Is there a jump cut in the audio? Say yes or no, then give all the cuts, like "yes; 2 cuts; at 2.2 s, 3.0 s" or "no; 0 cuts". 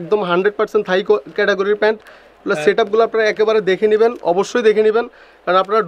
no; 0 cuts